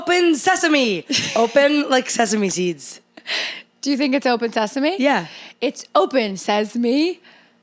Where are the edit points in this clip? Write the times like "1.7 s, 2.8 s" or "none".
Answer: none